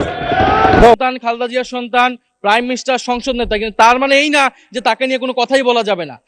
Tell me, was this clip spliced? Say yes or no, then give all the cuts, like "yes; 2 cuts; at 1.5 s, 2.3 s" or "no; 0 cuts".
yes; 1 cut; at 0.9 s